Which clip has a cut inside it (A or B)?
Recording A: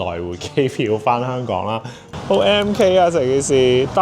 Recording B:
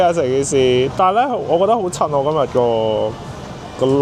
A